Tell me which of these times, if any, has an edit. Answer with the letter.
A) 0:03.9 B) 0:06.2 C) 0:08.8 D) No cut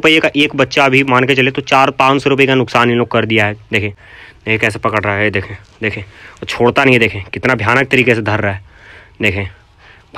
A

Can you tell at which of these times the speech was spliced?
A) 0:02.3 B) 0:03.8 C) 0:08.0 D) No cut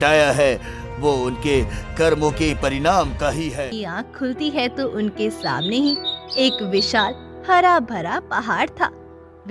B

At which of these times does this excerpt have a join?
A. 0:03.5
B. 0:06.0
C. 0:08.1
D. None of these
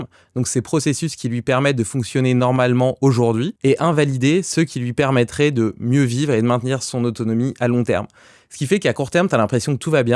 A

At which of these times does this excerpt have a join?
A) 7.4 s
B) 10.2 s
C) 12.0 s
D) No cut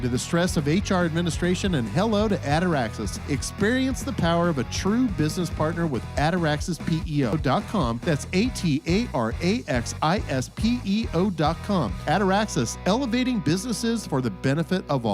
A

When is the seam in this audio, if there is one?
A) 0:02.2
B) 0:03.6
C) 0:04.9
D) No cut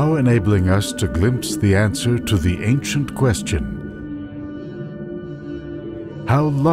B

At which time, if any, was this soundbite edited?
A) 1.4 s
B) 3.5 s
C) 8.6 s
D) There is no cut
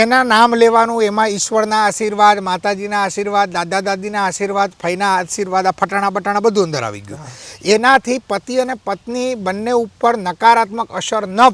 D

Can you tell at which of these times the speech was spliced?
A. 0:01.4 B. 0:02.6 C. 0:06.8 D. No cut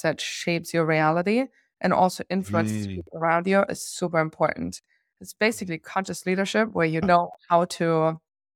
C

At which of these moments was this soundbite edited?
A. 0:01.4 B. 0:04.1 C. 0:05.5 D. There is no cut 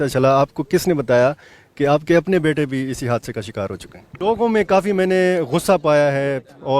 B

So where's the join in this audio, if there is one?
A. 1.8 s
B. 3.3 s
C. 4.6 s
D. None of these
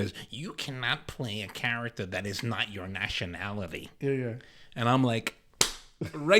D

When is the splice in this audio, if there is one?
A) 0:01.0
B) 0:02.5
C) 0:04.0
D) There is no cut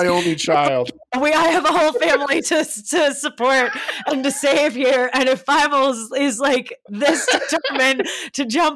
A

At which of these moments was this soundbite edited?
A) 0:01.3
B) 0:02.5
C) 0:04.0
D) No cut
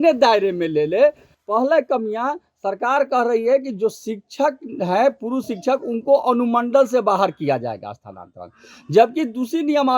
A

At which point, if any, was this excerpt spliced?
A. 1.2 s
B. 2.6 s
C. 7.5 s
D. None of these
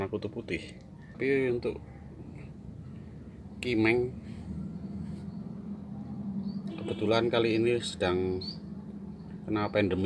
A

